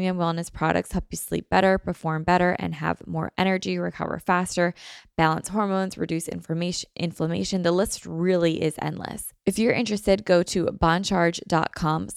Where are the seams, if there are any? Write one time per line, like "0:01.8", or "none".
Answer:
0:09.3